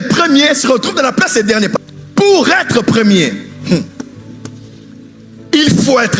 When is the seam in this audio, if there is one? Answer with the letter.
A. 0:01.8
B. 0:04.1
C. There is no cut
A